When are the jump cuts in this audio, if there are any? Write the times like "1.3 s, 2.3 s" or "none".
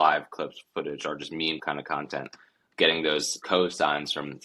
1.6 s, 3.4 s